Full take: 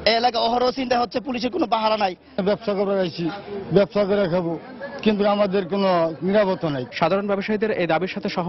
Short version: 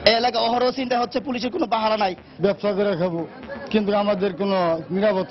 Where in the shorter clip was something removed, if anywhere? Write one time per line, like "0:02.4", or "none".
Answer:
0:02.2